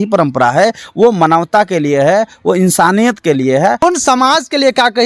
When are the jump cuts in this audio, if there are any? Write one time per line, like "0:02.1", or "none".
0:03.8